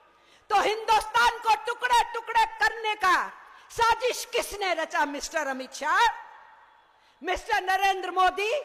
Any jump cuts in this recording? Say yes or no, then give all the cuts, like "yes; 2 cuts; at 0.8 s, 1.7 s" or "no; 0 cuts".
no; 0 cuts